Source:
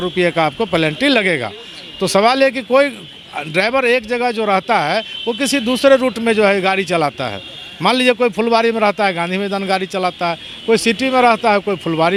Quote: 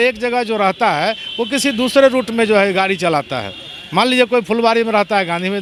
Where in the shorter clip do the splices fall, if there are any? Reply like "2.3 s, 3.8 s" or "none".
none